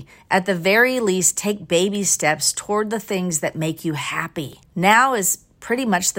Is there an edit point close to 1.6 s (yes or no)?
no